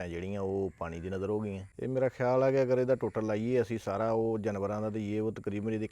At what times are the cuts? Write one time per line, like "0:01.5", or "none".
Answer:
0:01.7